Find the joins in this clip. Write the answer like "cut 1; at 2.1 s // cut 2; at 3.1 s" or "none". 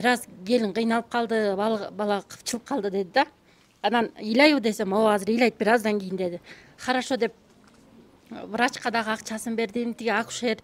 none